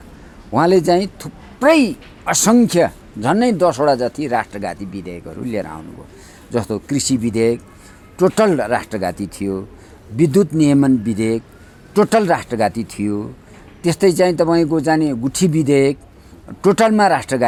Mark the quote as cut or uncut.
uncut